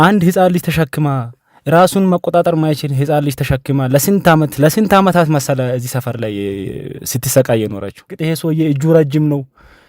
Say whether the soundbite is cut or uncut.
cut